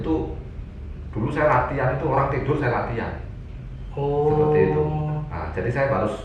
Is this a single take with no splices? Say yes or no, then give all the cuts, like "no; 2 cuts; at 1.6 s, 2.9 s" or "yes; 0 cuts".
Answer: yes; 0 cuts